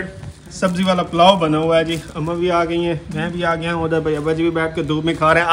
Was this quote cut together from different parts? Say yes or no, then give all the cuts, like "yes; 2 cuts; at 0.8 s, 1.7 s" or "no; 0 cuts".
no; 0 cuts